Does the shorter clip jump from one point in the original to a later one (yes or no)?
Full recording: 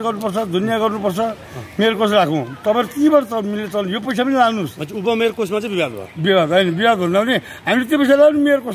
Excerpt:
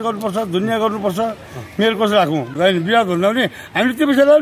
yes